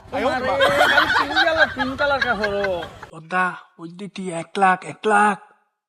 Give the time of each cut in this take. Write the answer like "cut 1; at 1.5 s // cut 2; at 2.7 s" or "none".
cut 1; at 3.0 s